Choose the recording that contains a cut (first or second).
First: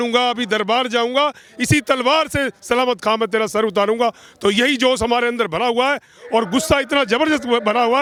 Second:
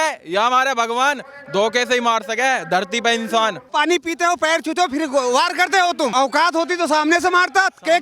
second